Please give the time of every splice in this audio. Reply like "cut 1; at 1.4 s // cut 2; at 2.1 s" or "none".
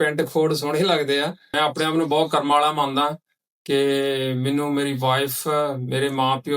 cut 1; at 1.4 s